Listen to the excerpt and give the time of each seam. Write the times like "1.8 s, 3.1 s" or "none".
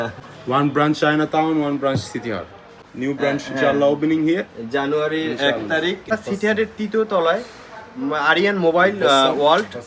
2.8 s, 6.1 s